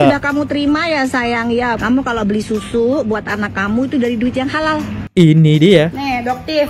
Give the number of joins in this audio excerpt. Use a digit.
2